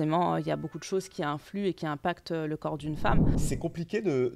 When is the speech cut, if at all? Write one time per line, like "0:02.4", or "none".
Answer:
0:03.3